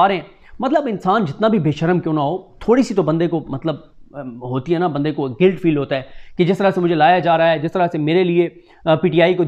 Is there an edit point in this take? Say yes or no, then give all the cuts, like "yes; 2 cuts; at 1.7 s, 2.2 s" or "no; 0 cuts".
no; 0 cuts